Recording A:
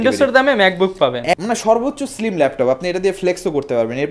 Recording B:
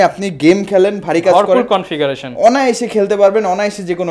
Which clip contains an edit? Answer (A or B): A